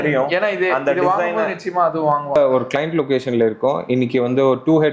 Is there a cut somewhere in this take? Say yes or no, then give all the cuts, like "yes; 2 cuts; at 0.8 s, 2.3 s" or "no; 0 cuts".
yes; 1 cut; at 2.4 s